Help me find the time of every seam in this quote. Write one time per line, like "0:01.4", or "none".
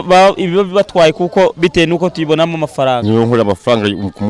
0:03.0